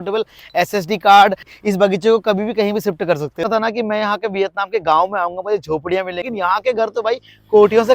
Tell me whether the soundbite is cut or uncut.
cut